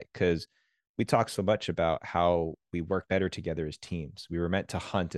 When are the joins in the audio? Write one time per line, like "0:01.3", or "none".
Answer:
0:03.1

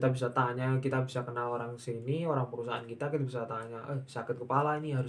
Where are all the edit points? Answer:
none

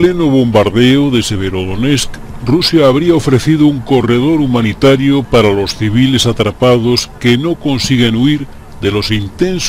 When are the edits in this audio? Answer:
none

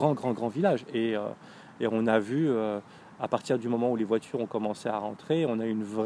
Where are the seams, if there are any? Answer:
none

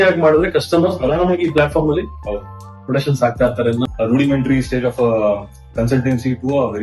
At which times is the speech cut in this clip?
0:03.8

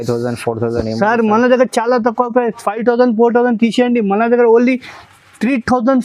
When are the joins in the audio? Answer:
none

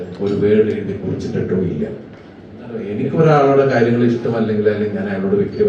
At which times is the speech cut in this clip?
0:02.9

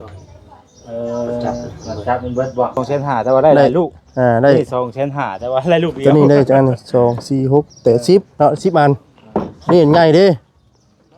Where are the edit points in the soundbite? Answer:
0:02.8

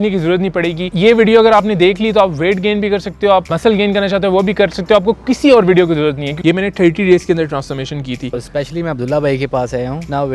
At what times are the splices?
0:06.3
0:08.3

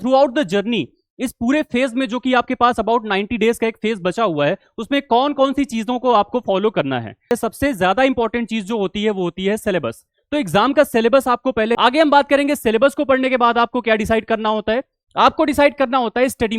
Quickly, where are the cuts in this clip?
0:07.3
0:11.8

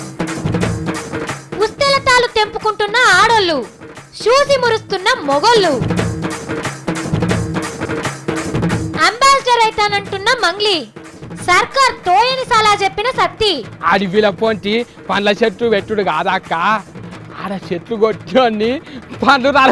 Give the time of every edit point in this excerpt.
none

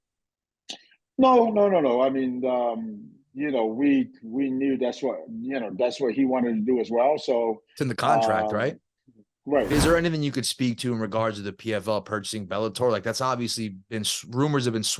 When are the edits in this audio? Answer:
0:09.7

